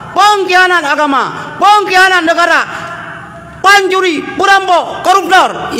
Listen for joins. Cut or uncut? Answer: uncut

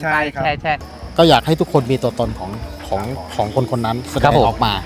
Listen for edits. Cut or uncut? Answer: cut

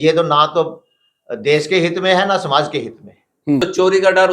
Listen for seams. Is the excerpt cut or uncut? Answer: cut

